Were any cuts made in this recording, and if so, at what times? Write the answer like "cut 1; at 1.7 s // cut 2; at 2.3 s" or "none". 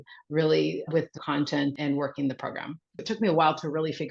cut 1; at 1.7 s // cut 2; at 3.0 s